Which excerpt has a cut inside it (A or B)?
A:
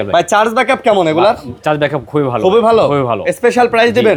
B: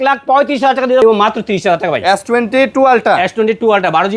B